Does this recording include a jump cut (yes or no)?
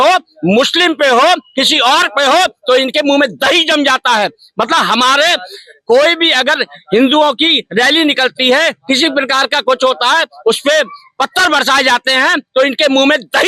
no